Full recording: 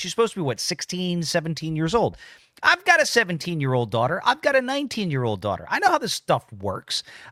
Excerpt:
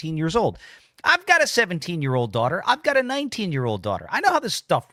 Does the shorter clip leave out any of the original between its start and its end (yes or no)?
no